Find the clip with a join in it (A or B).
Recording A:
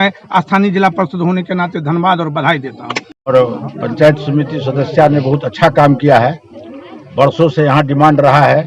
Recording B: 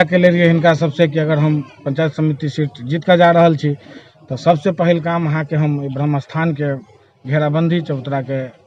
A